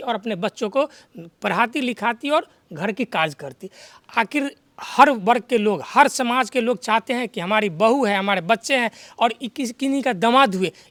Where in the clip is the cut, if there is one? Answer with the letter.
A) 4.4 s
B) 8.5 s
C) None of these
C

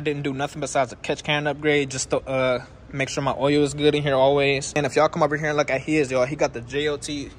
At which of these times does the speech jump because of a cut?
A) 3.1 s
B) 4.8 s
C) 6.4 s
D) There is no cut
B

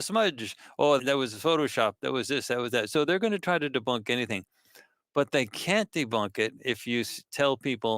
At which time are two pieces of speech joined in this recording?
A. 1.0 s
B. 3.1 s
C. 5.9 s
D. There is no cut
A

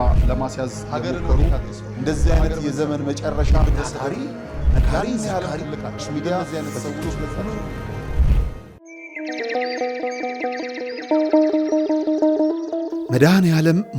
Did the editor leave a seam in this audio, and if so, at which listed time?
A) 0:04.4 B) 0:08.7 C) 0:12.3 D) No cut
B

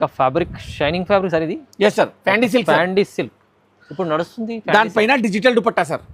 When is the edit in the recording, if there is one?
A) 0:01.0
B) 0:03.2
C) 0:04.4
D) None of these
D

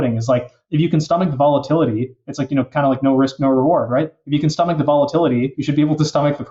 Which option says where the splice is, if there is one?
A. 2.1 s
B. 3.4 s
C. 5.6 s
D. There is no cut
C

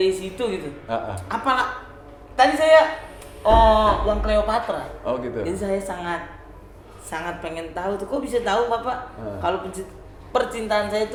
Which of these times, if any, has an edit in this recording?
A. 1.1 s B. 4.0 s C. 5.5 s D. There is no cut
D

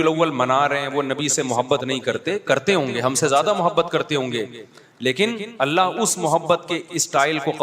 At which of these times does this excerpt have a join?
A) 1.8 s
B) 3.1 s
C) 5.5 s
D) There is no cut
C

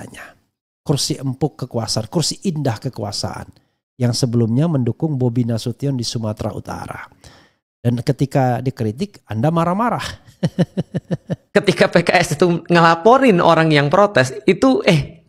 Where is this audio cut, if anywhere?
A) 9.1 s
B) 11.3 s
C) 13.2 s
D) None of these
B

